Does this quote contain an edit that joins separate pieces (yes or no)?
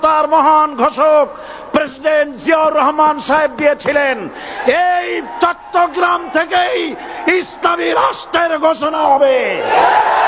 no